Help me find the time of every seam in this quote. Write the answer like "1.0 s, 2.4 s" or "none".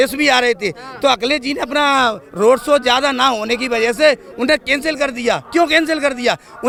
none